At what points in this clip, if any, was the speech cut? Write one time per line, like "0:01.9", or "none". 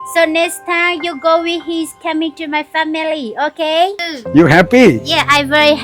0:04.1

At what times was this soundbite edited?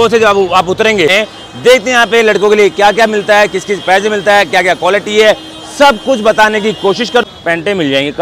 0:01.1
0:07.2

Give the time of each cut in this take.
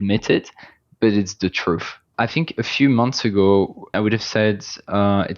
0:02.1
0:03.9

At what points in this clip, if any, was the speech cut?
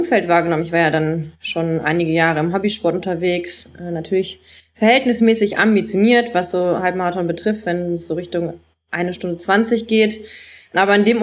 none

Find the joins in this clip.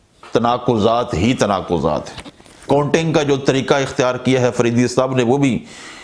none

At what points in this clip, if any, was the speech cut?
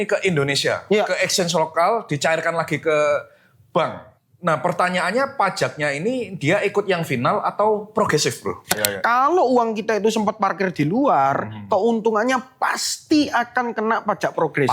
0:04.1
0:08.7

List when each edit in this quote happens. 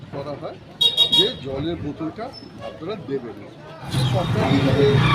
0:03.9

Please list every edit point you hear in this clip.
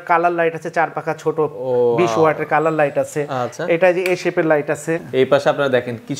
0:05.0

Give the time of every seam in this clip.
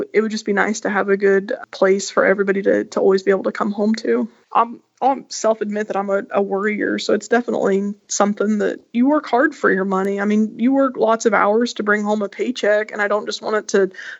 0:04.4

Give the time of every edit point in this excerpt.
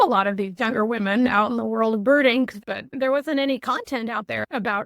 0:02.6

